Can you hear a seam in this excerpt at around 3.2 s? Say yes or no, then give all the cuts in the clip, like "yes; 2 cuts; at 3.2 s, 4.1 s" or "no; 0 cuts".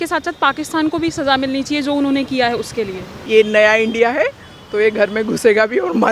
yes; 1 cut; at 3.2 s